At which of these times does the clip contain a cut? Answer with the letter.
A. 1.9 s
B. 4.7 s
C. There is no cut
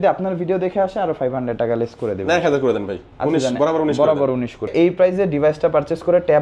B